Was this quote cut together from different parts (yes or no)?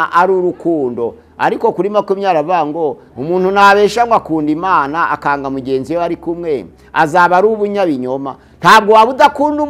no